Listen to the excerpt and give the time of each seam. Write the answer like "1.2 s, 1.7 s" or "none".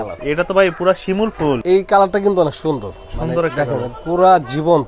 1.6 s